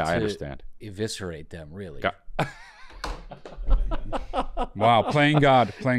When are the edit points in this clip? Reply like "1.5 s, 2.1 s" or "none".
none